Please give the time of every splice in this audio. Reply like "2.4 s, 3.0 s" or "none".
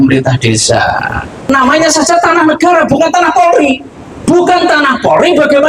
1.5 s, 4.2 s